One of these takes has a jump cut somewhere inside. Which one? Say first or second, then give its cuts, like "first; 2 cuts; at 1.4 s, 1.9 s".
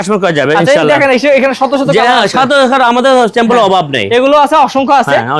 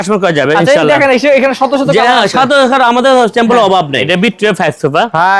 second; 1 cut; at 4.0 s